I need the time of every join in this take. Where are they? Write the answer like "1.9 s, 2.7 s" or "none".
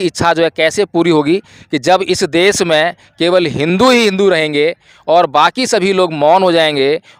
none